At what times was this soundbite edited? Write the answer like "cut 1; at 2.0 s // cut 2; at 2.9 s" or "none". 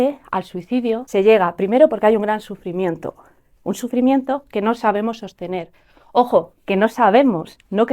cut 1; at 1.0 s